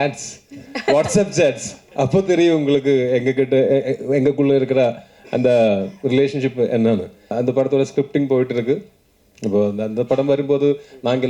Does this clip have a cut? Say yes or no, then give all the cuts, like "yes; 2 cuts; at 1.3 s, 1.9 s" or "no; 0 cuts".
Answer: yes; 1 cut; at 7.3 s